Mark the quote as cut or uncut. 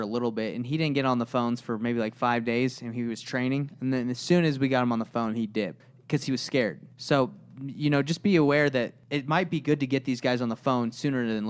cut